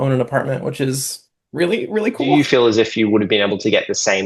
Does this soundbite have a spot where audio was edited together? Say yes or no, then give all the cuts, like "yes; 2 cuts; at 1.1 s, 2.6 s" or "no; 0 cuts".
yes; 1 cut; at 2.3 s